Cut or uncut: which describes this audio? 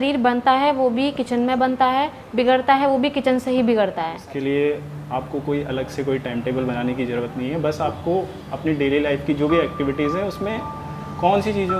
cut